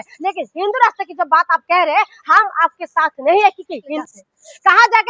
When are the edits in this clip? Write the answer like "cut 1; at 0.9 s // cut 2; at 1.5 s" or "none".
cut 1; at 4.0 s